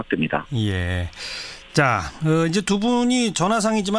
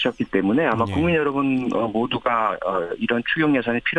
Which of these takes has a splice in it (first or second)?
first